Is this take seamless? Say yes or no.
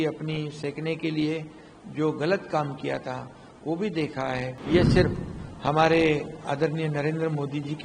no